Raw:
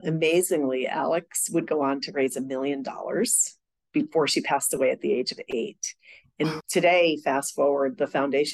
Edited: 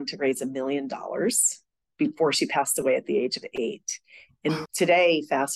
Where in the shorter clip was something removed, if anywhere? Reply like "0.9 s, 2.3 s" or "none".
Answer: none